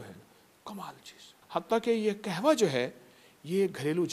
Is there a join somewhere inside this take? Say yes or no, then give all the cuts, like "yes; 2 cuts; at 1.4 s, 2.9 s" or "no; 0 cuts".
yes; 1 cut; at 1.3 s